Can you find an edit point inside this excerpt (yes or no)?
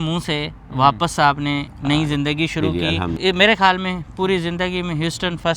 yes